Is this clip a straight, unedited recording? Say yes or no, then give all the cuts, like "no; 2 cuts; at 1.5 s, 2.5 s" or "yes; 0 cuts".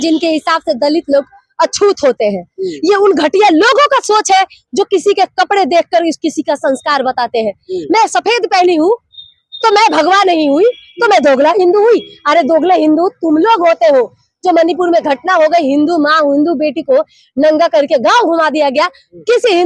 yes; 0 cuts